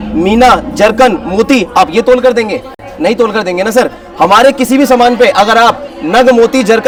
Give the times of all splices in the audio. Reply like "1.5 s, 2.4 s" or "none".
none